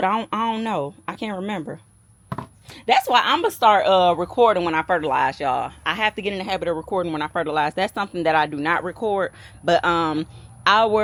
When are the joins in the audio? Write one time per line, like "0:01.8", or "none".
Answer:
none